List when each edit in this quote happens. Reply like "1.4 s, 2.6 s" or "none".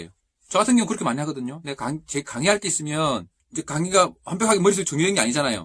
3.4 s